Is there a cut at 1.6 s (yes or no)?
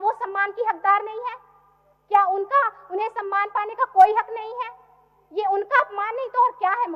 no